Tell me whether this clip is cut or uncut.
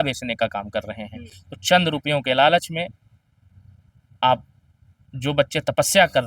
uncut